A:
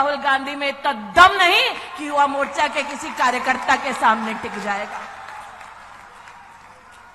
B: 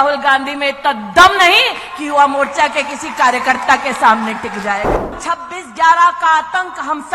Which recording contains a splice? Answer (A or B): B